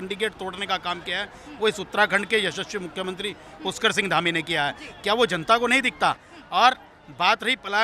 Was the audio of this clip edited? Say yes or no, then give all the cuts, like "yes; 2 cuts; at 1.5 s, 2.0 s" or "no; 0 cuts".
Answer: no; 0 cuts